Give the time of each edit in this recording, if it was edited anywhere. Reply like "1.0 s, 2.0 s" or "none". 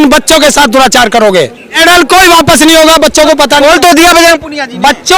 1.7 s